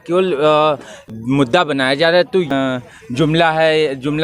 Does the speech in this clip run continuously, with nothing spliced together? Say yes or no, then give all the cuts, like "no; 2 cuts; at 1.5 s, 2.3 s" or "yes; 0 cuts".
no; 2 cuts; at 1.1 s, 2.5 s